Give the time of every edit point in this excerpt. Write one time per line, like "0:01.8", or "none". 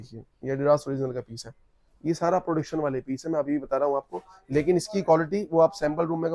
none